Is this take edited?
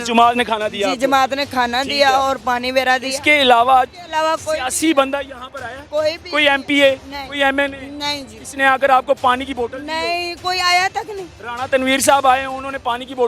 no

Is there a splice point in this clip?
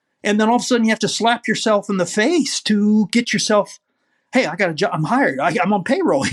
no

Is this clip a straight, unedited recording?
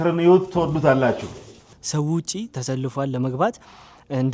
no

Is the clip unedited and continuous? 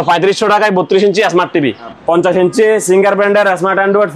no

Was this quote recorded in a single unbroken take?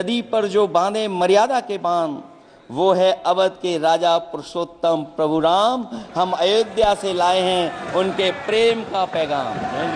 yes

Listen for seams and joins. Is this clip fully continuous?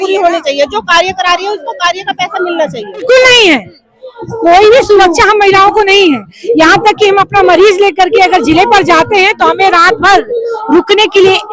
no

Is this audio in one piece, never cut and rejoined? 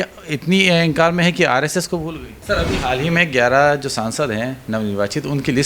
no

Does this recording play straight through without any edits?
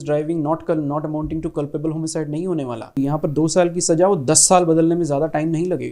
no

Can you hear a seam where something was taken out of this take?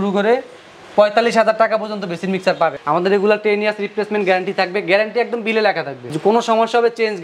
yes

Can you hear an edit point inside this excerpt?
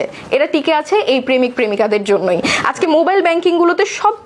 no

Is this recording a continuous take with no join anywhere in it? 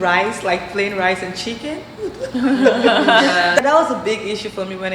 no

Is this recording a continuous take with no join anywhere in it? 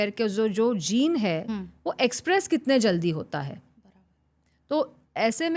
yes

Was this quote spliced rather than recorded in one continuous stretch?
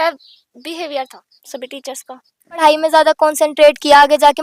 yes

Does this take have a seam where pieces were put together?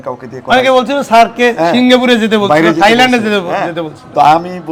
no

